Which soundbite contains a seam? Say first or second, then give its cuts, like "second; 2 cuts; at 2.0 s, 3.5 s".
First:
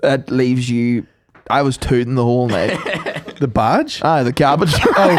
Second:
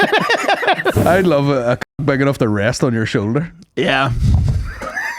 second; 1 cut; at 1.0 s